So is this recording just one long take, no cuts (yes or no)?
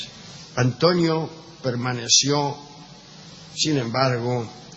no